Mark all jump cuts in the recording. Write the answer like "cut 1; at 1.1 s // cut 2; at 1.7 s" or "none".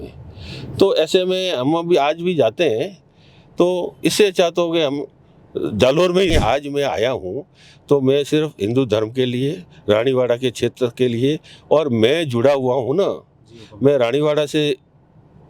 cut 1; at 6.3 s